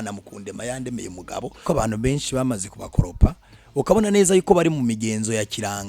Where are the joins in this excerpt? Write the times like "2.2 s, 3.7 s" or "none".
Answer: 1.6 s